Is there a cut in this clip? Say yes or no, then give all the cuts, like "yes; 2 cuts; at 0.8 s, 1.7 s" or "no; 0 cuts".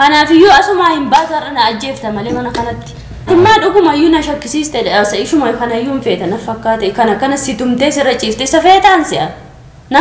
yes; 1 cut; at 3.3 s